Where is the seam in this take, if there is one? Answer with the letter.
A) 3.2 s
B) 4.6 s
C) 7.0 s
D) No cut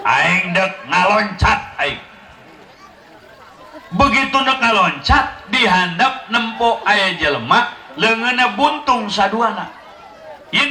D